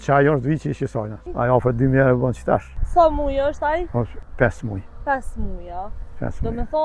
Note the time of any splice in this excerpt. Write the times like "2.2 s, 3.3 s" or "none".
1.2 s, 2.8 s, 4.2 s